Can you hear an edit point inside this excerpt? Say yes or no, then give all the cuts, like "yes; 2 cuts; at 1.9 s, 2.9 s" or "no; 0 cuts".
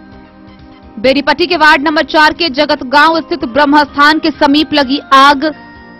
yes; 1 cut; at 1.0 s